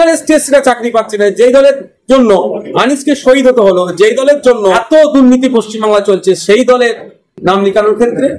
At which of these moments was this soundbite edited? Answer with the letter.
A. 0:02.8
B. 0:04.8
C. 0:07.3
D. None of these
B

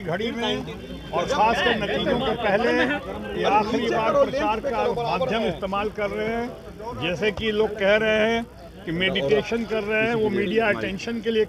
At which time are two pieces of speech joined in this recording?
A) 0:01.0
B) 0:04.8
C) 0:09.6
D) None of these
D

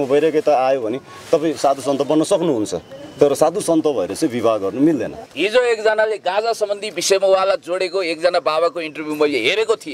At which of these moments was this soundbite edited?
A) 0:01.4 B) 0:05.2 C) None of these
B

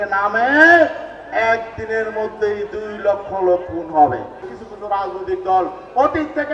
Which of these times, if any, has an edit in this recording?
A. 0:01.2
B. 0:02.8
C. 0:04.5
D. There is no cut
C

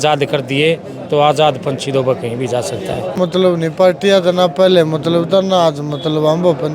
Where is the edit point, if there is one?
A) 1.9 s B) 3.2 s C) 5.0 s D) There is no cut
B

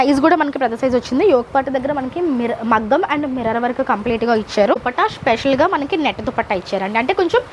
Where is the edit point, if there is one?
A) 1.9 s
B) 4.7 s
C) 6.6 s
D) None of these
B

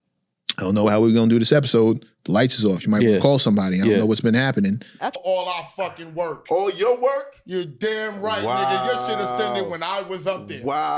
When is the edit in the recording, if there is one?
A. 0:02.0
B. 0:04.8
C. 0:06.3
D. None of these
B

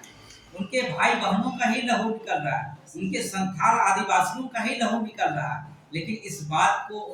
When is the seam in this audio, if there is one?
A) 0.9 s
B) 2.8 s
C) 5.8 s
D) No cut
D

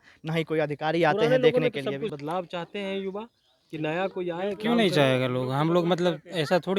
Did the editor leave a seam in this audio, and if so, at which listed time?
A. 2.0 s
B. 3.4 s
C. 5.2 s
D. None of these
A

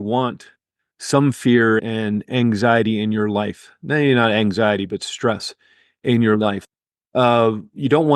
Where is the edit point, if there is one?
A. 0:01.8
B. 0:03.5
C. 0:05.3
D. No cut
A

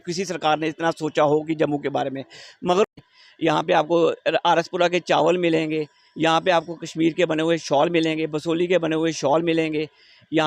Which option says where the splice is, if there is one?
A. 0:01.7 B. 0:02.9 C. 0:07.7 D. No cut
B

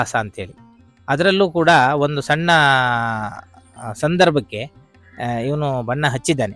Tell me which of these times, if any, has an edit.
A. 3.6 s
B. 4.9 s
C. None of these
C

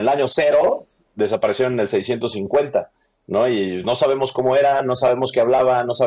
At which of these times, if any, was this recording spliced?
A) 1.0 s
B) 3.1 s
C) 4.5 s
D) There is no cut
A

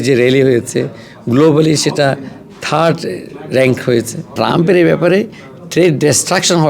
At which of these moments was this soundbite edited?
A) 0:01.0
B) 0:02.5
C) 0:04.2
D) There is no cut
C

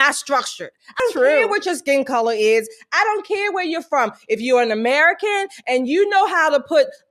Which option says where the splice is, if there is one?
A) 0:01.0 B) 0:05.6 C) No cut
A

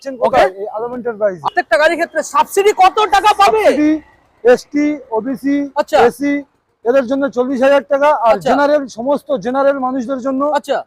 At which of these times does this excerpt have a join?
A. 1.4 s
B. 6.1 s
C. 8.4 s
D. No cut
A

